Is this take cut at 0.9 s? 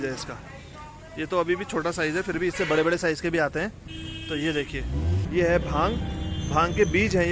no; 1 cut; at 5.2 s

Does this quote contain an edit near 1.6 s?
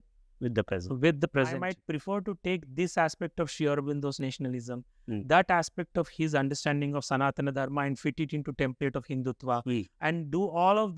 yes; 1 cut; at 1.6 s

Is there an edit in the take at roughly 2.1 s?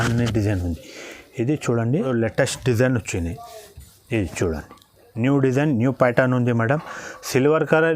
yes; 1 cut; at 2.1 s

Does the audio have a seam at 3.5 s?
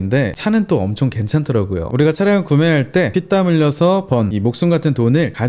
no; 1 cut; at 1.9 s

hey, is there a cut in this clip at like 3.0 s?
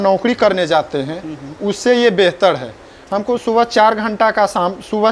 no; 0 cuts

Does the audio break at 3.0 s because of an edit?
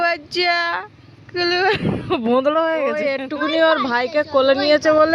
yes; 1 cut; at 3.0 s

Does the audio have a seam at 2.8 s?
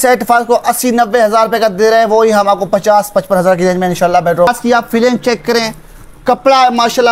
no; 1 cut; at 4.5 s

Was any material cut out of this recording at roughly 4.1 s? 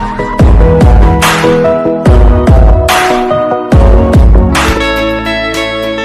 yes; 1 cut; at 4.1 s

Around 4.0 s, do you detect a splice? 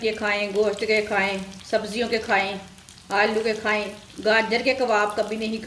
yes; 2 cuts; at 1.5 s, 4.0 s

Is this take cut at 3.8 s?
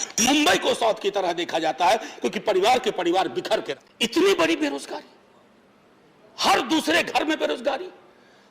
yes; 1 cut; at 3.8 s

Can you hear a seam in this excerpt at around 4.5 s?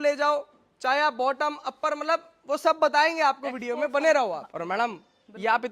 yes; 1 cut; at 4.5 s

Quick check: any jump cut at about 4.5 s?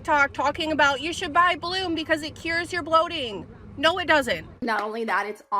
yes; 1 cut; at 4.5 s

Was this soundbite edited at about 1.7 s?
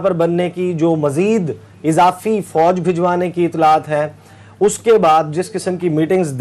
no; 0 cuts

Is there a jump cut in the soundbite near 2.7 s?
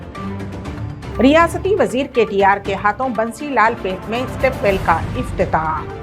no; 1 cut; at 1.2 s

